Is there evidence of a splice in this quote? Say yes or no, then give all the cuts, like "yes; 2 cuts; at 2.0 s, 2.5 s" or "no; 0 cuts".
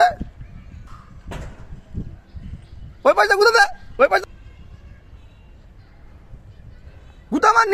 no; 0 cuts